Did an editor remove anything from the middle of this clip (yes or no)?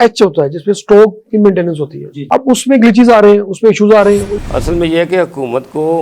yes